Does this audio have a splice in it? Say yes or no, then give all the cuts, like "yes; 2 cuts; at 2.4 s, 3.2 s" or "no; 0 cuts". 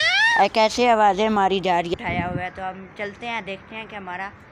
yes; 1 cut; at 1.9 s